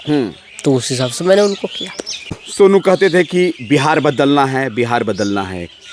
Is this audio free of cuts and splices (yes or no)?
no